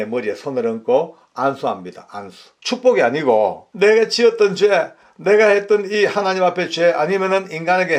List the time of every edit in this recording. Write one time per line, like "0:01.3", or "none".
0:02.5
0:03.6